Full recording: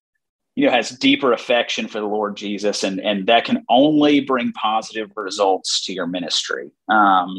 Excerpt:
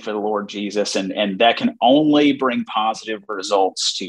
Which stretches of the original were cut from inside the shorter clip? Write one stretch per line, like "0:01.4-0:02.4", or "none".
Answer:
none